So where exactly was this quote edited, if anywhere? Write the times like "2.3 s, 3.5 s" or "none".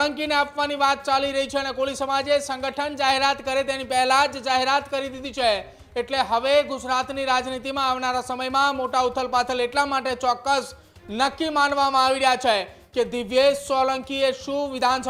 none